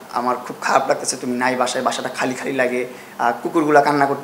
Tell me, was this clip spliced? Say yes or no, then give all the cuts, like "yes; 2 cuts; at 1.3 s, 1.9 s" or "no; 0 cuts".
no; 0 cuts